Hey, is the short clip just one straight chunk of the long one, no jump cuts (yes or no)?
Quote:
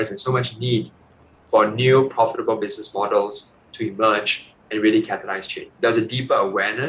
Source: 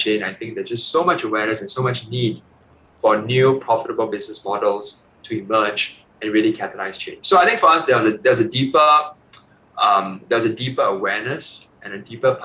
no